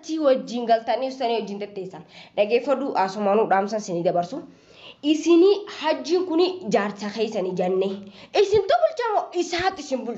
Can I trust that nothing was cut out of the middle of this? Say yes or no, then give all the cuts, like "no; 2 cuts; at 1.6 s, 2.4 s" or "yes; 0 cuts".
yes; 0 cuts